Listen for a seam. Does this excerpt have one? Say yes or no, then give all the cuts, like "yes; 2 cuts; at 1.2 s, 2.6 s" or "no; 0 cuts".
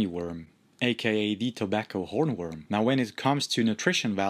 yes; 1 cut; at 2.6 s